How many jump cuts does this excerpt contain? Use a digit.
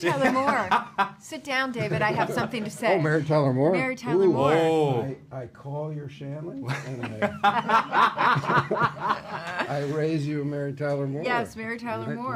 0